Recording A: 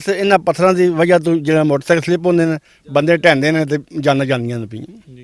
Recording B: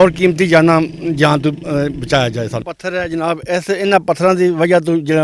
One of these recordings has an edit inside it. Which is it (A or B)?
B